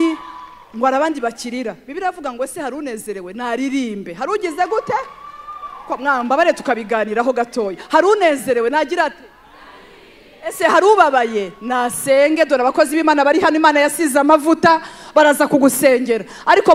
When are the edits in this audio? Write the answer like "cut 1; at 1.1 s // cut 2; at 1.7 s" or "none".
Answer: none